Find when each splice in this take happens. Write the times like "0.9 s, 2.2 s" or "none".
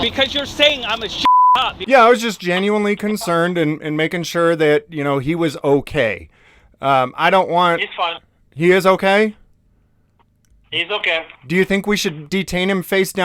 1.7 s